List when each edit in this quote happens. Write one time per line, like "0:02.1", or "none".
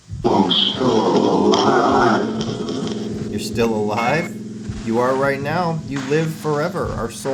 none